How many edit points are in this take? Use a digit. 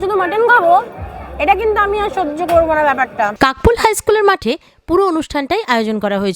1